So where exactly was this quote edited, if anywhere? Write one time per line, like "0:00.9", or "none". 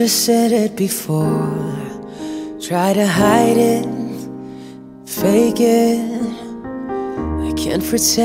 0:06.0